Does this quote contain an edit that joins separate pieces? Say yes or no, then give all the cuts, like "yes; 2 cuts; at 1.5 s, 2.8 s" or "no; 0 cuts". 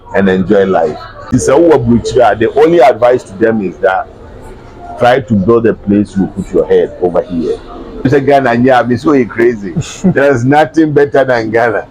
yes; 2 cuts; at 1.3 s, 8.1 s